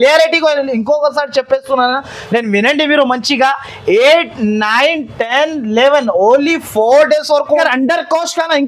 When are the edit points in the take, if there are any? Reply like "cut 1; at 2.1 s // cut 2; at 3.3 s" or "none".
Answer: cut 1; at 7.6 s